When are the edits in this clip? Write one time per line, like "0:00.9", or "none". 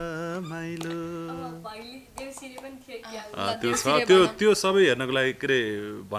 none